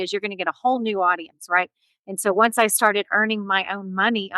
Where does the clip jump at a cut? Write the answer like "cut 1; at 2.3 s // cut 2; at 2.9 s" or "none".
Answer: cut 1; at 1.9 s